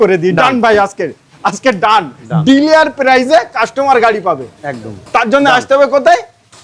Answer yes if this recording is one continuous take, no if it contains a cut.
yes